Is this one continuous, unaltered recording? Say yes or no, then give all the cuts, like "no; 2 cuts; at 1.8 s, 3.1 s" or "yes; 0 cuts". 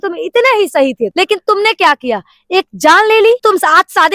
yes; 0 cuts